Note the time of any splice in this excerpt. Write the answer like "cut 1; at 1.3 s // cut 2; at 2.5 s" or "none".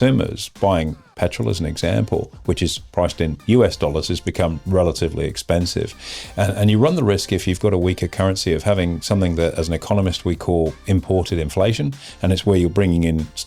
none